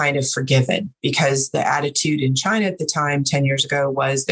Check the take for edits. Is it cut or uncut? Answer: uncut